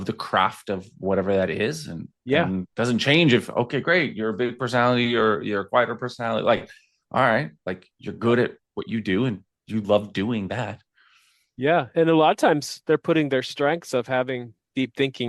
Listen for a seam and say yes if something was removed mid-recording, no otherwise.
yes